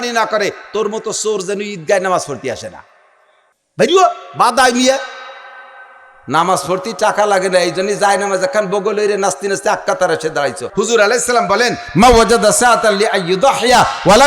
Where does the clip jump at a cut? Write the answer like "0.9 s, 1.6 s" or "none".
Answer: 10.6 s